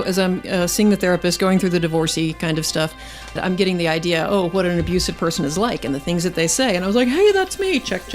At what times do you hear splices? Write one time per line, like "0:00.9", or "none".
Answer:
0:03.4